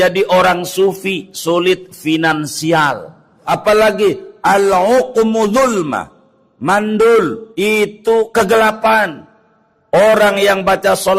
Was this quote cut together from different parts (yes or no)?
yes